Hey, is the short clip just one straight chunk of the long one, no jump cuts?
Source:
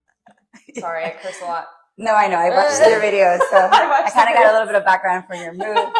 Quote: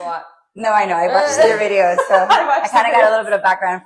yes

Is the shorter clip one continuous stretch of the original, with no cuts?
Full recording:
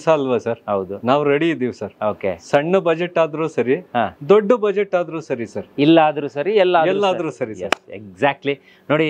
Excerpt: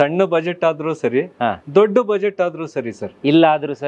yes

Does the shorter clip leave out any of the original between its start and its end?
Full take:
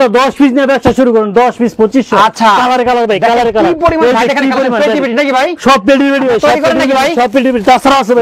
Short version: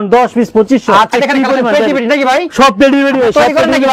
yes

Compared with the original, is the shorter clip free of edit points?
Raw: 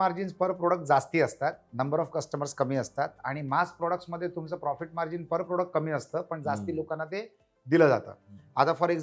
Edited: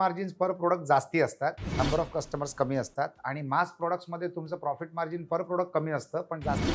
yes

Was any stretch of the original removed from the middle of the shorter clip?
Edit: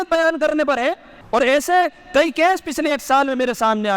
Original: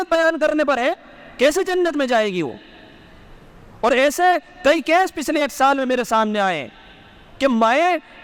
yes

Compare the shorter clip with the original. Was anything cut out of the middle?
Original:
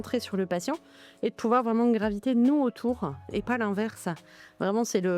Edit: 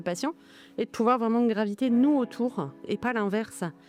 no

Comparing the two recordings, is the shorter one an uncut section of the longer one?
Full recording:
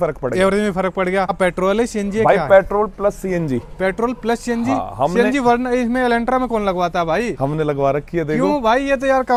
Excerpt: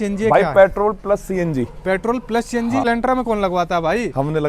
no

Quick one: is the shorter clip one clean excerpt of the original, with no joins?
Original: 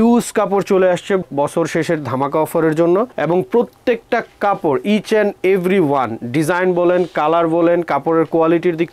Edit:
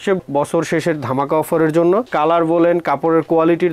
no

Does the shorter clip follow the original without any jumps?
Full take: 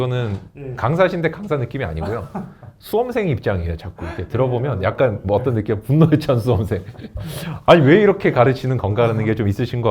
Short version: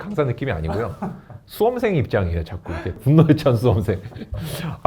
no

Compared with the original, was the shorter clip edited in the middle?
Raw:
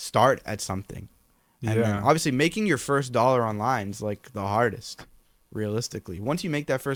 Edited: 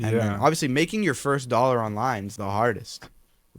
yes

